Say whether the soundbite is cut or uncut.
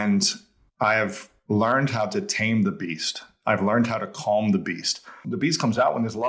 cut